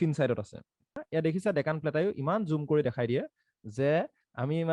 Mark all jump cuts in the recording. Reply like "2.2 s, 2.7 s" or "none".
1.0 s

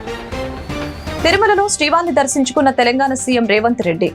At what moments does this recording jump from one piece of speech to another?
none

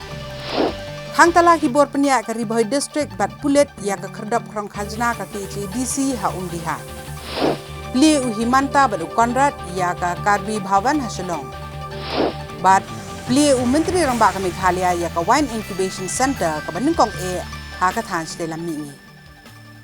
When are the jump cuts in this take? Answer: 18.9 s

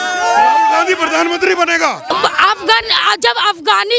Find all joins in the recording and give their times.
2.0 s

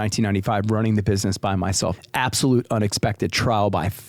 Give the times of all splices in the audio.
2.0 s

